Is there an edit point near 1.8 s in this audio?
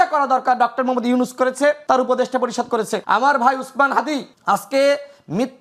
yes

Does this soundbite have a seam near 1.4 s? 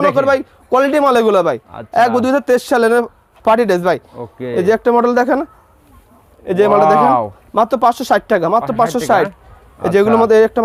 no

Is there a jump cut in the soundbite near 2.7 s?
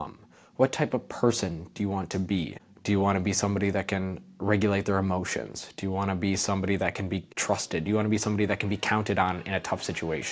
yes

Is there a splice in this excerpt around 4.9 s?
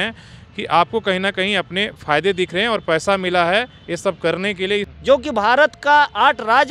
yes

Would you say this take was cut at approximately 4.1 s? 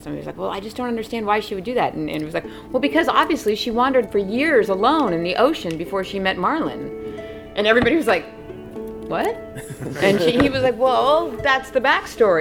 yes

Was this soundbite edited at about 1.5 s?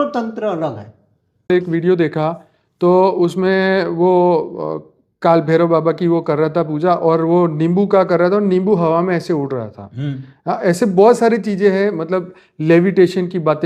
yes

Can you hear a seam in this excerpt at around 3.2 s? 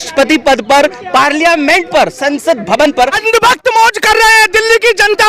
yes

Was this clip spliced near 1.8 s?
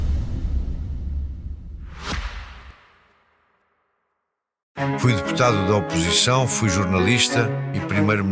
yes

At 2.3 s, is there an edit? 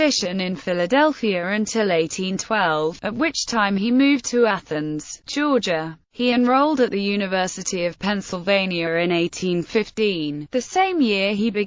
yes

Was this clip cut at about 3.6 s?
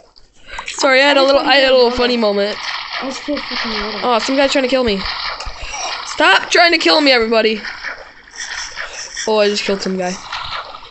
yes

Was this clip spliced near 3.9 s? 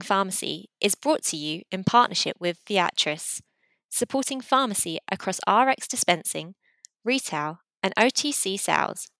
no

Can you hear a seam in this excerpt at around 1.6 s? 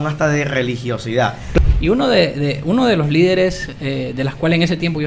yes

